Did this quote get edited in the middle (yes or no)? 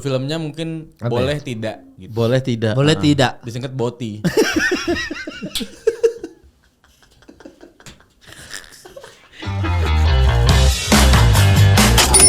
yes